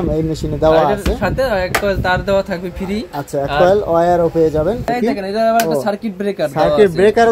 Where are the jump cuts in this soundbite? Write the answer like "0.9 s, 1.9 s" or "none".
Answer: 4.9 s